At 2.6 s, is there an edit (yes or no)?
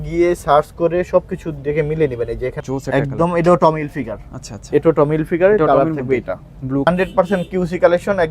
yes